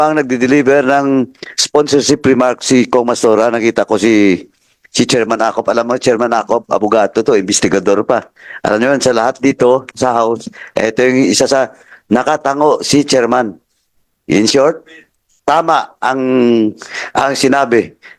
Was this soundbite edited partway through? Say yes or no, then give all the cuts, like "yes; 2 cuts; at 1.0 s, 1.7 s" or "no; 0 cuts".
no; 0 cuts